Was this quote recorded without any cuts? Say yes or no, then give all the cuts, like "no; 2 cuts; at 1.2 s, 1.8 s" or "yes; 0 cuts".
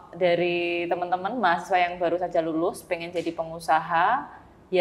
yes; 0 cuts